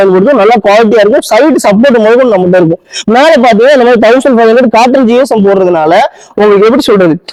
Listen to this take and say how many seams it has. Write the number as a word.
zero